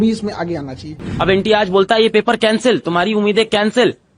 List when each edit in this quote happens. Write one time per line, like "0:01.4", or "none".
0:01.1